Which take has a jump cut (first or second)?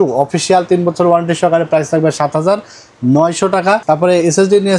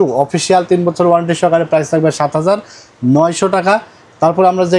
first